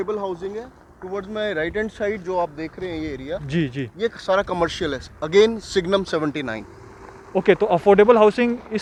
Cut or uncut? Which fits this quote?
uncut